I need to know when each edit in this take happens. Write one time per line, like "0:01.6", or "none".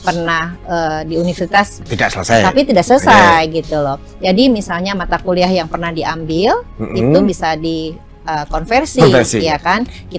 0:01.8